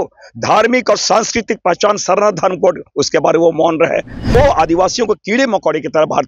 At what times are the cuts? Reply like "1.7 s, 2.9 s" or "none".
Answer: 4.3 s